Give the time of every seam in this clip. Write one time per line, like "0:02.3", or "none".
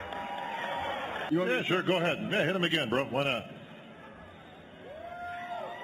0:01.2